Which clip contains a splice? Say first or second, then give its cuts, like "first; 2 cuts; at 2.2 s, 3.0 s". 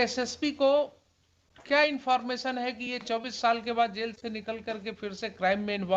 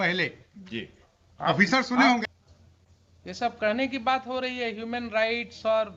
second; 1 cut; at 2.2 s